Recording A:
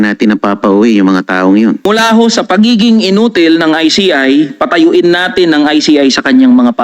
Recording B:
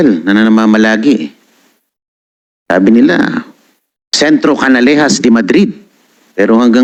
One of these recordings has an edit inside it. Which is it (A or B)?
A